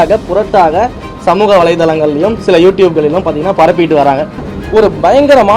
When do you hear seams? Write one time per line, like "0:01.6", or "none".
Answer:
0:04.5